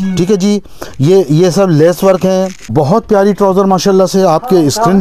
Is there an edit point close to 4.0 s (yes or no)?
no